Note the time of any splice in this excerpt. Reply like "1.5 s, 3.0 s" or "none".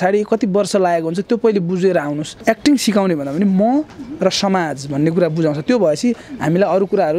2.3 s